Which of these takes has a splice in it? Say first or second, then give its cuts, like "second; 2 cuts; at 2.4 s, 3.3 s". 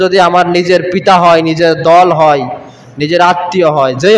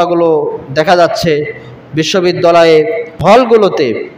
second; 1 cut; at 3.1 s